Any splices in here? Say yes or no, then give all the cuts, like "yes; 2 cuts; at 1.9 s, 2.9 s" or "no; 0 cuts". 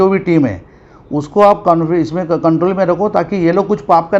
no; 0 cuts